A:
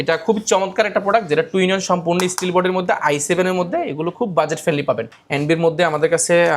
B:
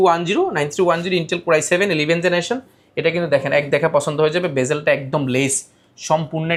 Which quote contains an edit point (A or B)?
A